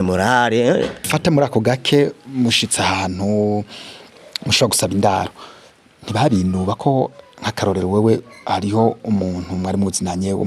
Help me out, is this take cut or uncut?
cut